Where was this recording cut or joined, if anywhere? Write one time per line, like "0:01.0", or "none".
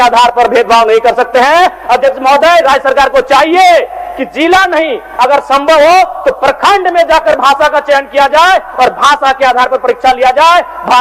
none